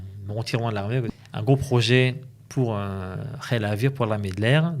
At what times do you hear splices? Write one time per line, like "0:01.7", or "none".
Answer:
0:01.1